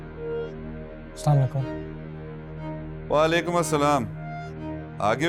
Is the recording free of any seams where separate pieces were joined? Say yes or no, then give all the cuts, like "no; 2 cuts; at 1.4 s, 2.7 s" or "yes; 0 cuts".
yes; 0 cuts